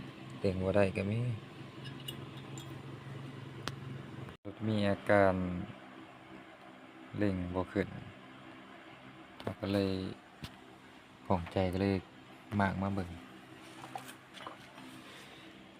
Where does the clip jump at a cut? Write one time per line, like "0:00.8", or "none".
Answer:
0:04.4